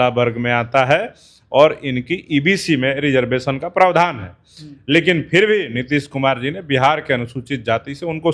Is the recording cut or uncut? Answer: uncut